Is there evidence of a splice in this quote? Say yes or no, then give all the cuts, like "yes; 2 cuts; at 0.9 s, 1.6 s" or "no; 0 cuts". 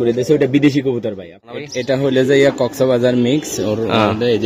yes; 1 cut; at 1.7 s